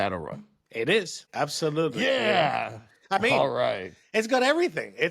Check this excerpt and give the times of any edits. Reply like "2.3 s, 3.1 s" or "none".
1.2 s